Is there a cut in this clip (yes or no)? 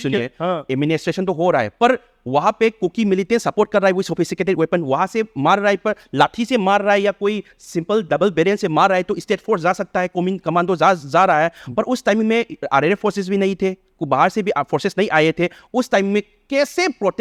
no